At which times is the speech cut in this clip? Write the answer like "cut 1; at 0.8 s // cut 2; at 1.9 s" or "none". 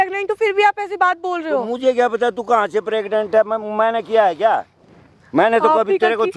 none